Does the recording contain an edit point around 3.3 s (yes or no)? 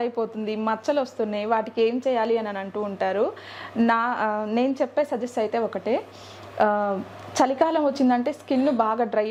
no